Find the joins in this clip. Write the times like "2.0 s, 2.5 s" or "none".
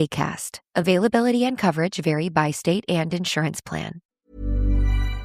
4.1 s